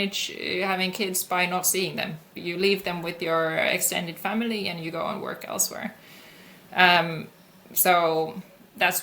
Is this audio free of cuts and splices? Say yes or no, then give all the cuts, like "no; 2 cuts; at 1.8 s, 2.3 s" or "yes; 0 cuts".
yes; 0 cuts